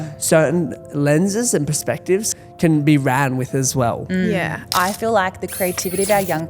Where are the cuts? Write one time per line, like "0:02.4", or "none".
0:02.3
0:04.6